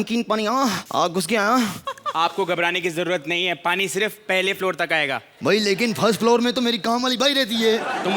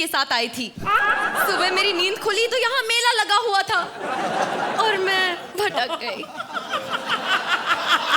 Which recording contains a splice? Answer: first; 1 cut; at 1.8 s

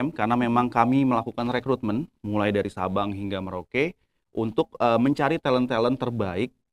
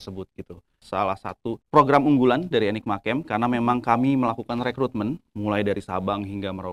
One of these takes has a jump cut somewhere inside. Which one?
second; 2 cuts; at 0.8 s, 1.6 s

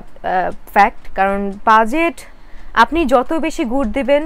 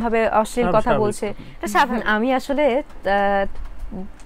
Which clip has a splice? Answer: second; 1 cut; at 1.9 s

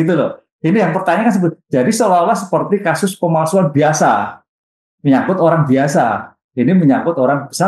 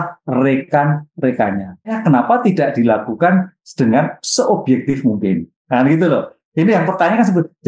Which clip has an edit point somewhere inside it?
second; 1 cut; at 2.0 s

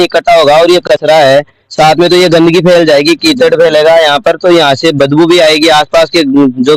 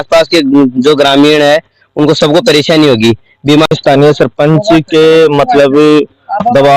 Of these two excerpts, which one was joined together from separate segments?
second; 1 cut; at 3.7 s

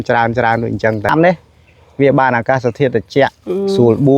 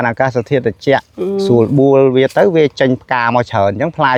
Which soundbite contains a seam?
first; 1 cut; at 1.1 s

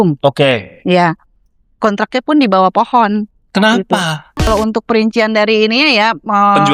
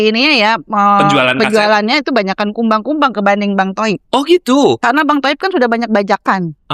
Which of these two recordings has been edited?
first; 1 cut; at 4.5 s

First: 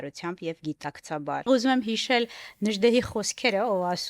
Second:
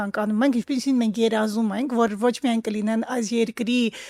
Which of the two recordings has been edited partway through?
first; 1 cut; at 1.5 s

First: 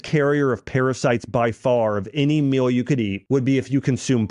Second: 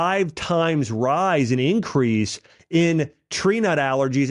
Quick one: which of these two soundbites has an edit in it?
first; 1 cut; at 3.2 s

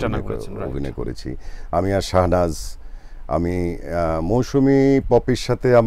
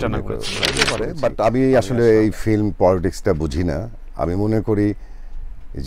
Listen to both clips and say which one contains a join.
second; 1 cut; at 0.9 s

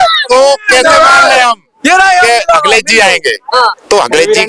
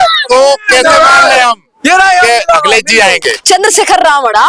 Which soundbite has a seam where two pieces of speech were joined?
second; 1 cut; at 3.4 s

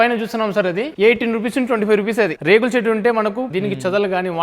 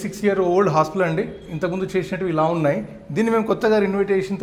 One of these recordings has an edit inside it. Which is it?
first; 3 cuts; at 0.9 s, 2.4 s, 3.5 s

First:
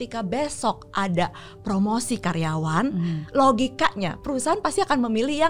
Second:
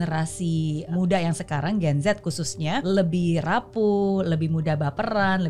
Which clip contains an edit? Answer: second; 2 cuts; at 0.9 s, 2.8 s

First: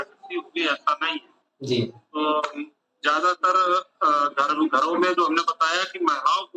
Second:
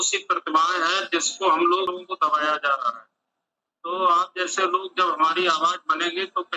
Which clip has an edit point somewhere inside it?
second; 1 cut; at 1.9 s

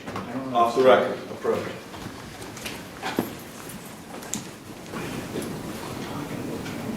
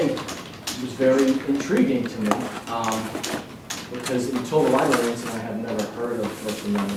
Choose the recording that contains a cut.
first; 1 cut; at 4.9 s

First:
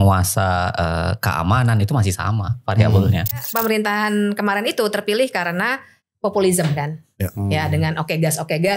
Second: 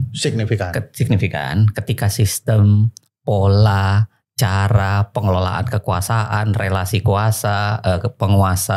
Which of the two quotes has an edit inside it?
first; 1 cut; at 3.4 s

